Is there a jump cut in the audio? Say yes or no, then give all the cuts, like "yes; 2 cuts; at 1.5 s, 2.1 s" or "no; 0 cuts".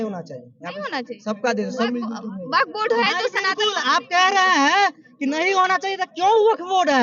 no; 0 cuts